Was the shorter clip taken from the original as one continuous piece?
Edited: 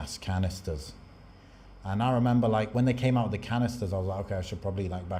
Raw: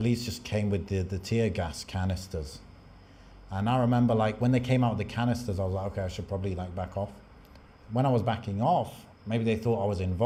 yes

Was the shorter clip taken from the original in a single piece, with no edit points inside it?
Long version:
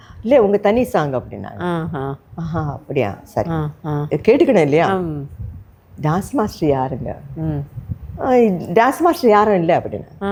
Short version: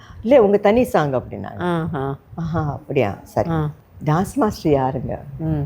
no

